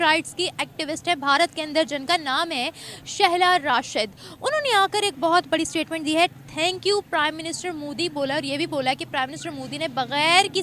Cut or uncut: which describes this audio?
uncut